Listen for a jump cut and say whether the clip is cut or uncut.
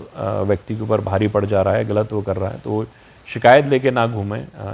uncut